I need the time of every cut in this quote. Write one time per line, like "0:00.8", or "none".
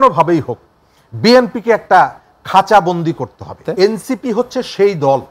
0:03.6